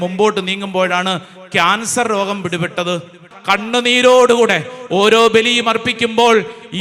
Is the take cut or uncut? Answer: cut